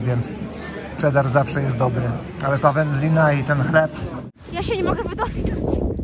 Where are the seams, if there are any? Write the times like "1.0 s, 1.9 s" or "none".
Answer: 4.2 s